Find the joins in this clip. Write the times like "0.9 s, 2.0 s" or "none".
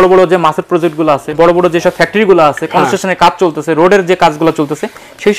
1.4 s